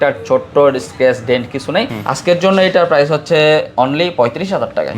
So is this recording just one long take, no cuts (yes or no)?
no